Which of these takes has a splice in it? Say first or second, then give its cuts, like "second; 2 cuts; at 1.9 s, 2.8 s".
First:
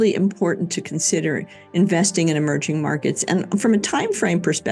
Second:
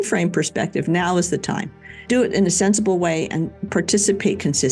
second; 2 cuts; at 2.1 s, 3.6 s